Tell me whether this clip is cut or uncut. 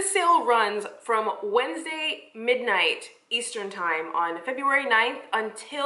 uncut